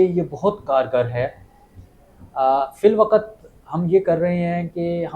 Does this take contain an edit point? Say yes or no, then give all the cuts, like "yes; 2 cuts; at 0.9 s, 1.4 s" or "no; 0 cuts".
no; 0 cuts